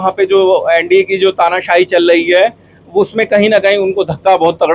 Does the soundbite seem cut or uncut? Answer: uncut